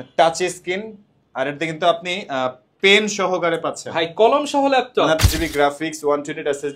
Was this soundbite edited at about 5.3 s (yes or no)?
yes